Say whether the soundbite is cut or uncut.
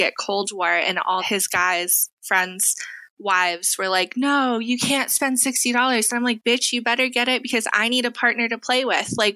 uncut